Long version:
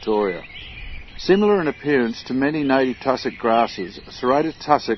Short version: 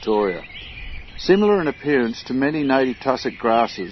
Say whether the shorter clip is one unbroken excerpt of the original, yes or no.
yes